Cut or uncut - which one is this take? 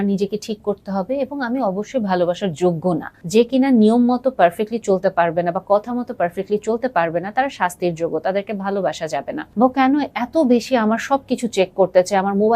cut